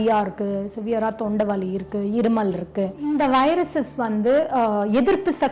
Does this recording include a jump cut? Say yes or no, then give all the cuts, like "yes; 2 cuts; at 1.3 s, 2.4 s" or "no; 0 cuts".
yes; 1 cut; at 3.0 s